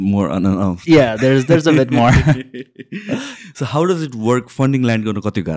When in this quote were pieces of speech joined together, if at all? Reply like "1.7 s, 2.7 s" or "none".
none